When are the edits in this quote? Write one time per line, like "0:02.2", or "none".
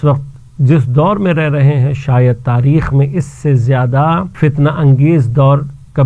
0:04.3